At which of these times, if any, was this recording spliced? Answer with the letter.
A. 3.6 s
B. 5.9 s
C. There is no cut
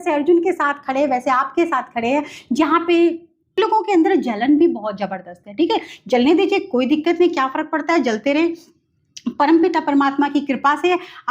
A